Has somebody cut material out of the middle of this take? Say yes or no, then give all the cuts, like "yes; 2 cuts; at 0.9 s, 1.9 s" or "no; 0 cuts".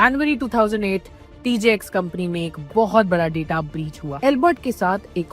yes; 1 cut; at 4.0 s